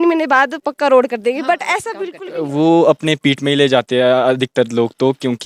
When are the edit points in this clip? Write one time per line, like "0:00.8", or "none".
0:02.0